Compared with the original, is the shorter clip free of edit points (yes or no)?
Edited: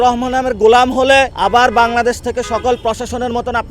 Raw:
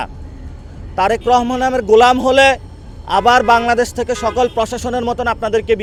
no